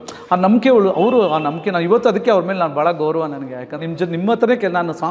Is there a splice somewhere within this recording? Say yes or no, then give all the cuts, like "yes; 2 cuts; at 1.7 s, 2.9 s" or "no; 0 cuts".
yes; 1 cut; at 3.8 s